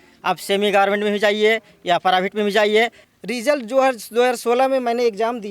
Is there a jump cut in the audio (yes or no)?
yes